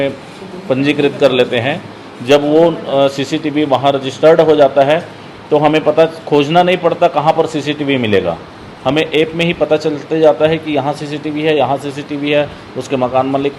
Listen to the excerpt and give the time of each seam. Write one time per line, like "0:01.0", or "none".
none